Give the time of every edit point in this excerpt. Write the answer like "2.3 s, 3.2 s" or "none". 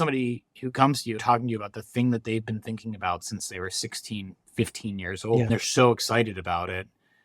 1.2 s, 5.5 s